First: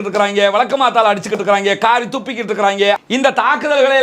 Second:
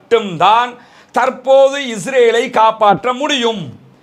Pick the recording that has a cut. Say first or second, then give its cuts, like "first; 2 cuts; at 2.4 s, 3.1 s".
first; 1 cut; at 3.0 s